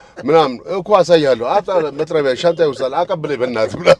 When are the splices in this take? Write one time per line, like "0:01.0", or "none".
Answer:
none